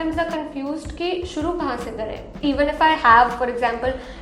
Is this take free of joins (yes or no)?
no